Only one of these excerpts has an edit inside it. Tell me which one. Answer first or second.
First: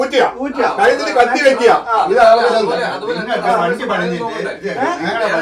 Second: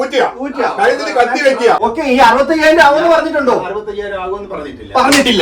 second